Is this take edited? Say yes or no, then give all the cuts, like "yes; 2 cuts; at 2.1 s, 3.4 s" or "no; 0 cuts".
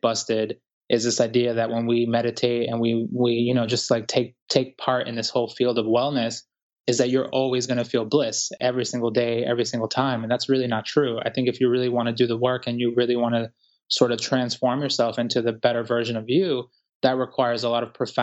yes; 1 cut; at 8.6 s